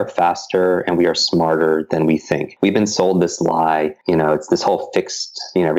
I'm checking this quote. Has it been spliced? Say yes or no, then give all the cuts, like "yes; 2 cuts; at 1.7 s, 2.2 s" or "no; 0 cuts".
yes; 2 cuts; at 2.5 s, 4.0 s